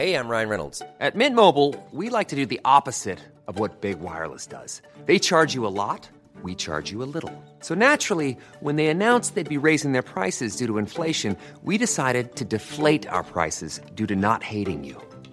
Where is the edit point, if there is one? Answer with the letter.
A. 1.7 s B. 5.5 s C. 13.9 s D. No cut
D